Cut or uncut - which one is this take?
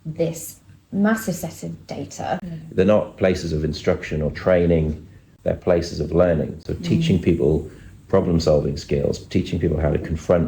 cut